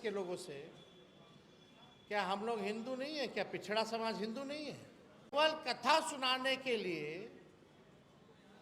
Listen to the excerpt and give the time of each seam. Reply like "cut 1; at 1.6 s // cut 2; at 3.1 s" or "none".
cut 1; at 5.3 s